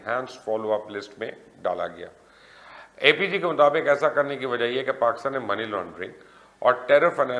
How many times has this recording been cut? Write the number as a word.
zero